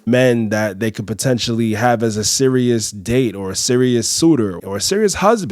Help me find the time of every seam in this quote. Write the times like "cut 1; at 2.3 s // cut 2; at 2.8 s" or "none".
cut 1; at 4.6 s